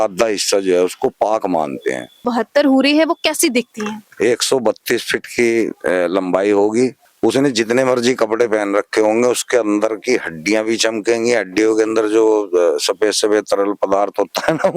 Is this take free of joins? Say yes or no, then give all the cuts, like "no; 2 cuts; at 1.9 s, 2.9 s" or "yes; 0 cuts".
no; 2 cuts; at 2.2 s, 7.0 s